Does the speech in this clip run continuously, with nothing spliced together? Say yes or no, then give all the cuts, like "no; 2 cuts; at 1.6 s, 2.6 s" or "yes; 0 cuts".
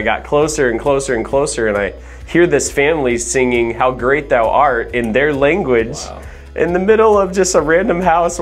yes; 0 cuts